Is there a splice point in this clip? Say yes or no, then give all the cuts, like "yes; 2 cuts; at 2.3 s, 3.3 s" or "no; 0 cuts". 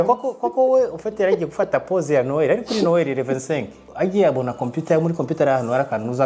yes; 1 cut; at 3.8 s